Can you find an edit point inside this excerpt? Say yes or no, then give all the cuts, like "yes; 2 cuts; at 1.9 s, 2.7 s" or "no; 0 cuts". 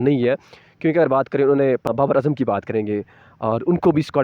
yes; 1 cut; at 1.9 s